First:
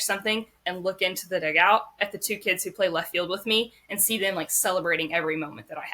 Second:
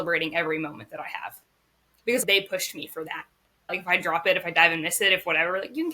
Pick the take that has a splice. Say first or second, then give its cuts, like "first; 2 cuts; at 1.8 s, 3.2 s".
second; 2 cuts; at 2.2 s, 3.8 s